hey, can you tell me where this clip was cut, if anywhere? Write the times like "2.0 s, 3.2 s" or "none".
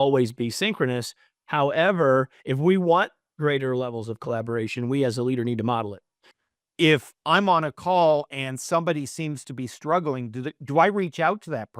6.3 s